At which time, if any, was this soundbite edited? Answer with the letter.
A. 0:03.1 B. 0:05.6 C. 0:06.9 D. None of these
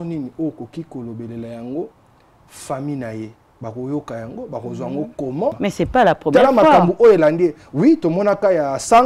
B